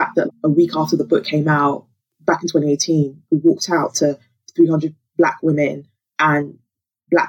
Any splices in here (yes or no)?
no